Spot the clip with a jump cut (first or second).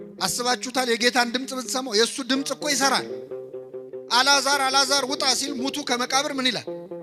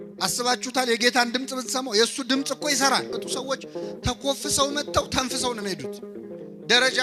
second